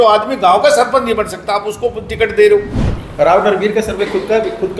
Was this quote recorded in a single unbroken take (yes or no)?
no